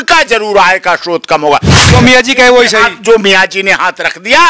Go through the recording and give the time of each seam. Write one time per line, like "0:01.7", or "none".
0:01.8